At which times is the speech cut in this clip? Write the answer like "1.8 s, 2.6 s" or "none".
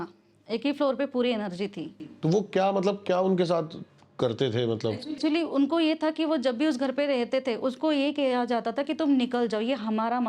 none